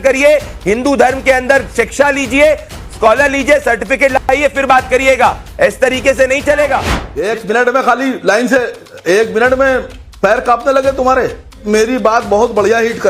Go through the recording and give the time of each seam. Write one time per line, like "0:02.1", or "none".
0:07.0
0:10.0
0:11.6